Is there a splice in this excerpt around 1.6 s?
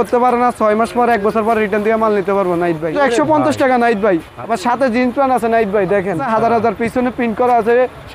no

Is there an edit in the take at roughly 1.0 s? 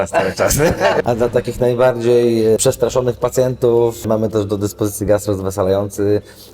yes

